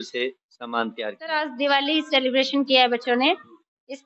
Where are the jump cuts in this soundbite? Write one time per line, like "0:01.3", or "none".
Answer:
0:01.2

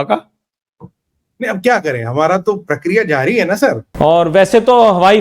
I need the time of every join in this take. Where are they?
0:03.8

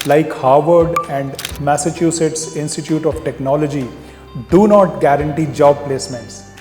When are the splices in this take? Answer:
none

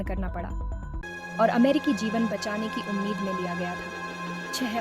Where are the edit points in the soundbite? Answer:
0:01.0

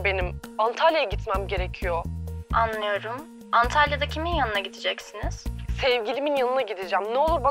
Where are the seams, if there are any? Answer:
none

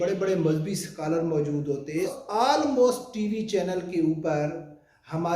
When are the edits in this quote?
0:02.2

